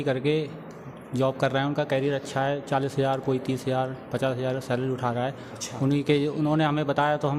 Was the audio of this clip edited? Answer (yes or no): no